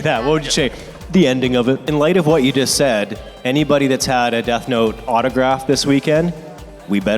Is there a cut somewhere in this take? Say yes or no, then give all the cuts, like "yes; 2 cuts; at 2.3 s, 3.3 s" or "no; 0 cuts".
yes; 1 cut; at 1.8 s